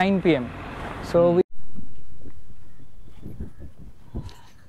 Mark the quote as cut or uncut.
cut